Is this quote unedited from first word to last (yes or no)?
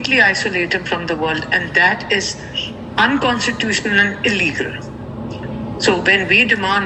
yes